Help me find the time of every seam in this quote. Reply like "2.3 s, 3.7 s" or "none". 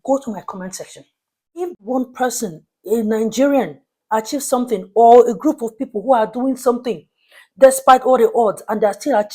1.8 s